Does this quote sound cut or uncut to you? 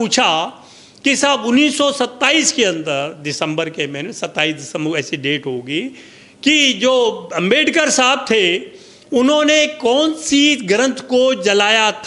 uncut